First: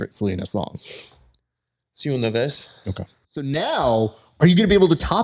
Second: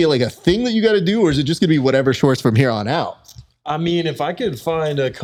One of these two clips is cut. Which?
first; 1 cut; at 3.3 s

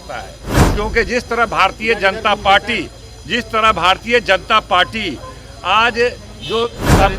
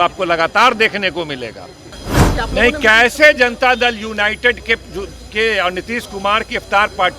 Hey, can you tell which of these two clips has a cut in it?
second; 1 cut; at 2.0 s

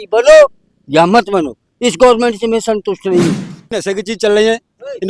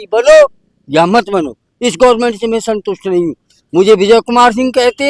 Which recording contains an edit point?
first; 1 cut; at 3.7 s

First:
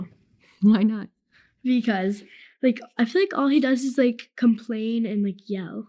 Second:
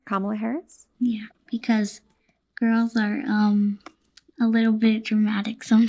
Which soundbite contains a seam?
second; 1 cut; at 3.0 s

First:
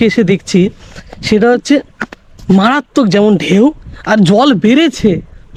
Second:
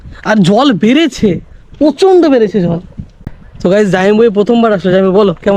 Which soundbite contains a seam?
second; 1 cut; at 3.4 s

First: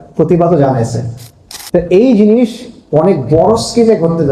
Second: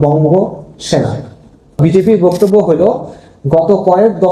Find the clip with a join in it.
second; 1 cut; at 1.8 s

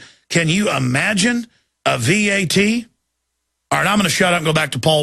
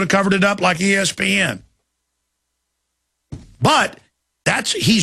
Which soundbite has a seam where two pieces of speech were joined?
first; 1 cut; at 1.1 s

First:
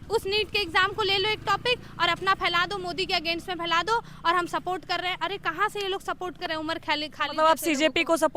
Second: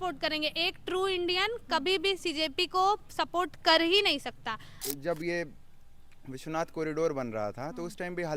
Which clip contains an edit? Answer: second; 1 cut; at 4.8 s

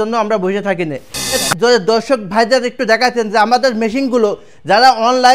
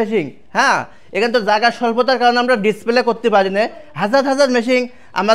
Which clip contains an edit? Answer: first; 1 cut; at 1.4 s

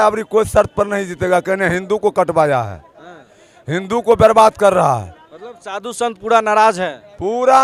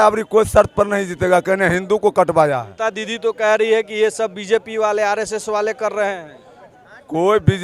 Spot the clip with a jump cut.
second; 1 cut; at 2.7 s

